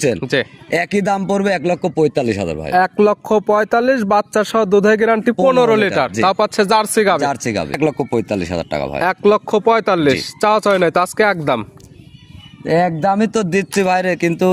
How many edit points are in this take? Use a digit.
1